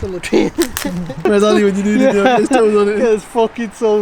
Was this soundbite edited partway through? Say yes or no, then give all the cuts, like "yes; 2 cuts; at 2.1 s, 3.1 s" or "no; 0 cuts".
yes; 1 cut; at 1.3 s